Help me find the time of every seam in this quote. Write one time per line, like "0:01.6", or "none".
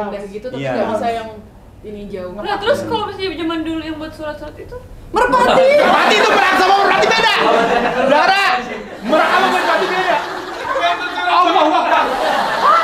none